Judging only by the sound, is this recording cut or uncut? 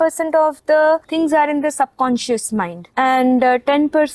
cut